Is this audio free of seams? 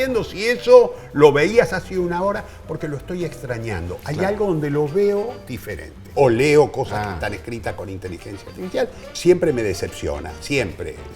no; 2 cuts; at 6.1 s, 9.0 s

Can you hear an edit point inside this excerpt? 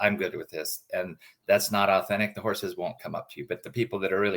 no; 0 cuts

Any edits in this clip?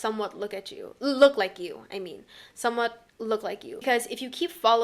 yes; 1 cut; at 3.8 s

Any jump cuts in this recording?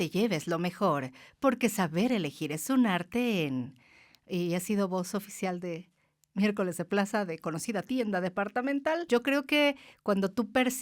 yes; 1 cut; at 9.0 s

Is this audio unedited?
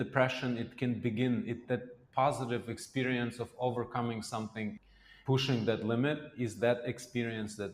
no; 1 cut; at 4.8 s

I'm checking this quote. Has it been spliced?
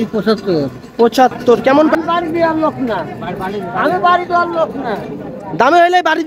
yes; 1 cut; at 1.9 s

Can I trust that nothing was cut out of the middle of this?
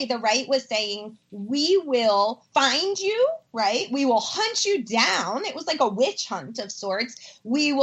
no; 1 cut; at 2.5 s

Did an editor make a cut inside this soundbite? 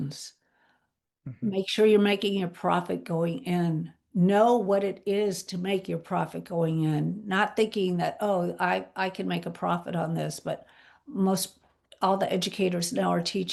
no; 0 cuts

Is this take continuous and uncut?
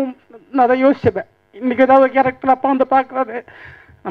yes; 0 cuts

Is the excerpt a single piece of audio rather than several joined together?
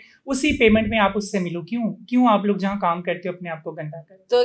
yes; 0 cuts

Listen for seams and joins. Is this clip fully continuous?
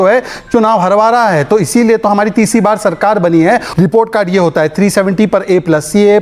no; 1 cut; at 3.7 s

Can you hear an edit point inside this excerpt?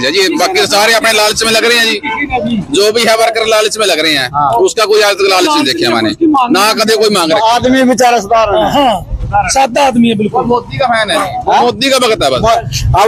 no; 0 cuts

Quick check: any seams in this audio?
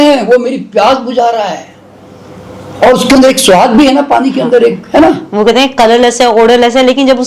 no; 0 cuts

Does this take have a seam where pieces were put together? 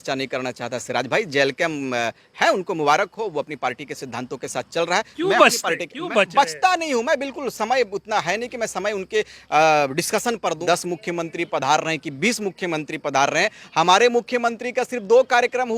yes; 1 cut; at 10.6 s

